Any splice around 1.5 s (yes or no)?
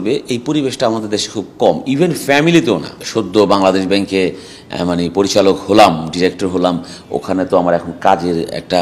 no